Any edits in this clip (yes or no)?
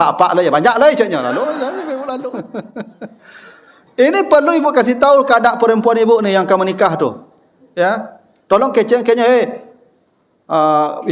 yes